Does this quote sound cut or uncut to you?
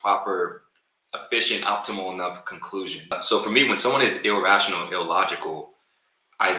cut